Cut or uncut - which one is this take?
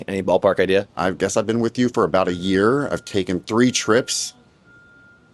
cut